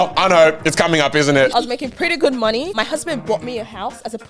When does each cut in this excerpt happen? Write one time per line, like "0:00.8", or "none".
0:01.5
0:02.7